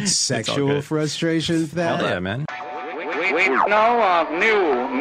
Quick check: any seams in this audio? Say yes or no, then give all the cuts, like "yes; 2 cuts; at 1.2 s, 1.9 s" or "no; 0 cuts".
yes; 1 cut; at 2.5 s